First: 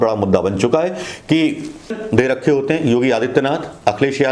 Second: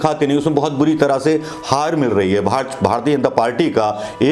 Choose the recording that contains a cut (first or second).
first